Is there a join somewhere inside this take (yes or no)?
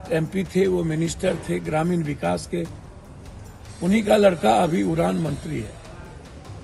no